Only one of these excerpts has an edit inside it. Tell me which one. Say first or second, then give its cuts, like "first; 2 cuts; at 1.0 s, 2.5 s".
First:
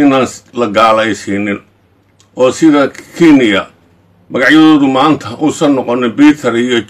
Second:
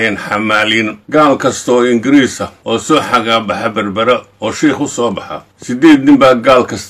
second; 3 cuts; at 1.0 s, 2.8 s, 5.6 s